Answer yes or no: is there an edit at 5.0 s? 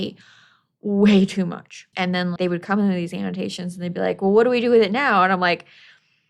no